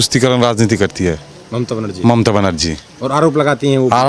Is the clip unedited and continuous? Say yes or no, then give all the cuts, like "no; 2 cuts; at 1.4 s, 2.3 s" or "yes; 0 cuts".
yes; 0 cuts